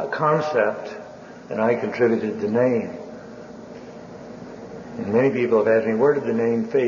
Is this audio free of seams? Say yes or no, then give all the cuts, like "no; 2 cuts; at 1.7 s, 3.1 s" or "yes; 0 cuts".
no; 1 cut; at 4.2 s